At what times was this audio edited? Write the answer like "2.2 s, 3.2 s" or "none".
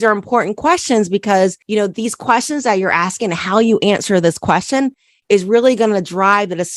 none